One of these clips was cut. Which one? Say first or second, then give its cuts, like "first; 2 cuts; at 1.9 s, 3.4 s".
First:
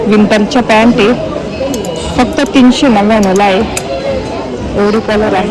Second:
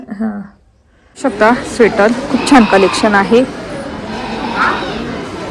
second; 1 cut; at 1.0 s